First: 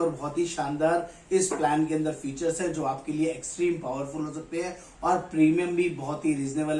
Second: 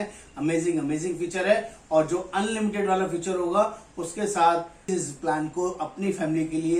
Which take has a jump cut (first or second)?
second